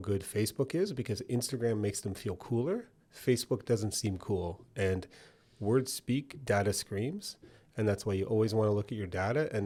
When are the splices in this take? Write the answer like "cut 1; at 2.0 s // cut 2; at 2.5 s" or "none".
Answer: none